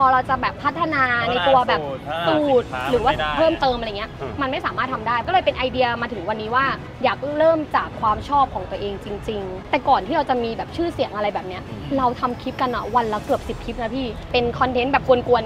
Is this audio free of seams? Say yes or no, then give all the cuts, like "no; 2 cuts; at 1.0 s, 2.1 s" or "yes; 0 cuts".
no; 4 cuts; at 5.3 s, 6.9 s, 9.6 s, 14.2 s